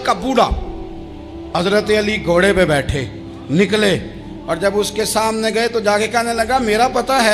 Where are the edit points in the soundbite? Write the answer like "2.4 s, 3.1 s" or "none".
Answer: 1.5 s